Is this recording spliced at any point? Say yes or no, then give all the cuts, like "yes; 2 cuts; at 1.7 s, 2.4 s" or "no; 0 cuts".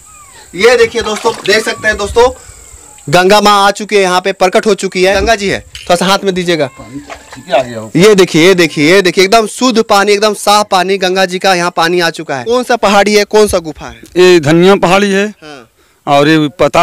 yes; 3 cuts; at 1.3 s, 5.2 s, 12.3 s